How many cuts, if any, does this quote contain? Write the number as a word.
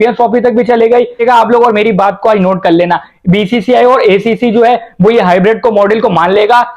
one